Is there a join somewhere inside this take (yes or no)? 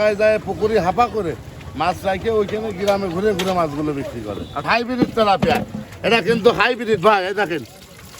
yes